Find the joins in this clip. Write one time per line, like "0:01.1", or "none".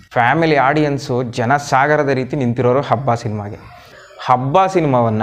0:03.9

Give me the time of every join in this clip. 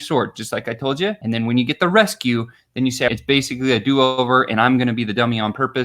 0:03.1

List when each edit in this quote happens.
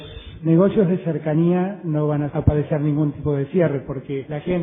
0:01.2

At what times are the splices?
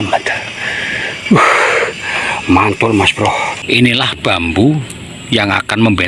0:03.6

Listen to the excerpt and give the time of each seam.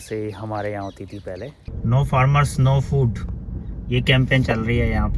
0:01.7

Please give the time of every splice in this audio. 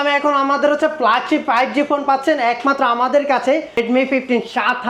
0:03.8

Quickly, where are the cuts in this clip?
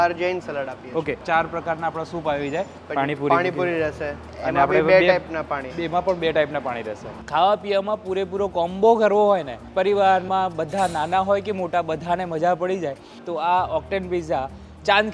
0:01.2
0:02.8
0:04.2
0:07.2
0:13.2

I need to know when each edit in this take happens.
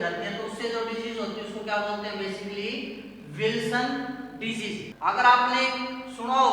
0:04.9

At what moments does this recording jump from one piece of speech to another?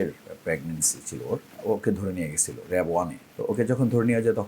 0:01.5
0:03.2

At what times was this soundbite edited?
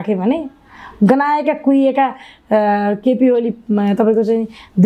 none

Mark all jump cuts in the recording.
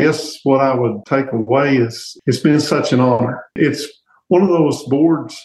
0:01.0
0:02.1
0:03.6

